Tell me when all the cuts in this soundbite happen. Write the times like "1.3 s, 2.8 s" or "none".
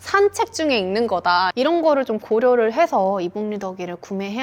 1.5 s